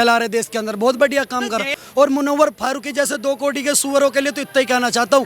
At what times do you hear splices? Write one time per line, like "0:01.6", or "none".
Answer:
0:01.8